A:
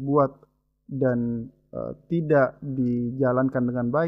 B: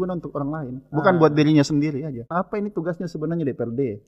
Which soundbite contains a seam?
B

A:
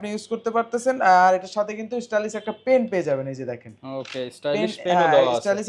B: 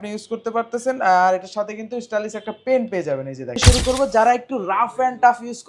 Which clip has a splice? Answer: B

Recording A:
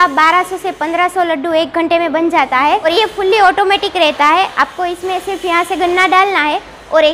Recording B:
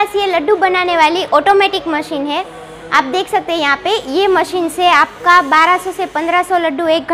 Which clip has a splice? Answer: A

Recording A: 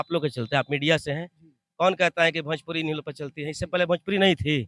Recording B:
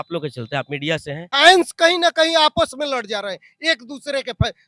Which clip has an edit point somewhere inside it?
B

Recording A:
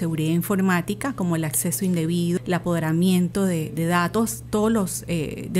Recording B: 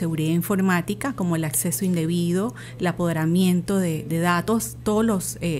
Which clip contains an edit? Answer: A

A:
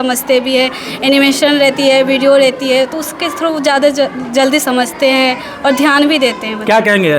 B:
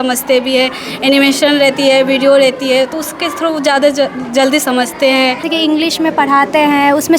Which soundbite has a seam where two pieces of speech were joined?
B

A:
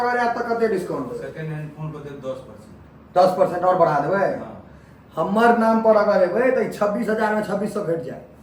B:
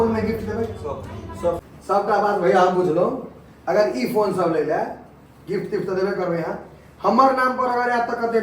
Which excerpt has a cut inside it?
B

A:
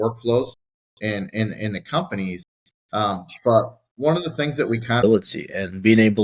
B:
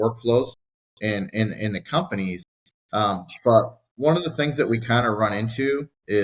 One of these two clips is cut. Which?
A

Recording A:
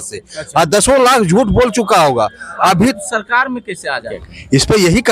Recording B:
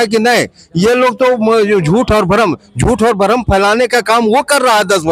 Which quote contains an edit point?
A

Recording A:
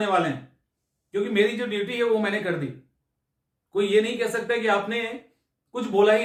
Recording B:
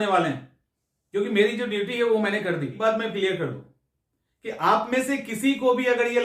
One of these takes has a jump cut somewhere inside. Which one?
B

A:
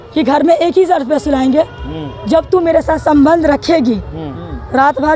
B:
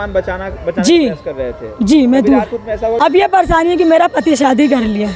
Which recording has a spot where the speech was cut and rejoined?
B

